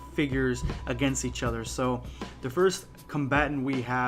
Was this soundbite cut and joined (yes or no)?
no